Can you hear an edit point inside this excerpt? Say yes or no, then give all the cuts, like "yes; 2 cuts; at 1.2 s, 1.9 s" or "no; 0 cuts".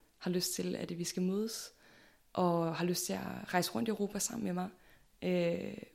no; 0 cuts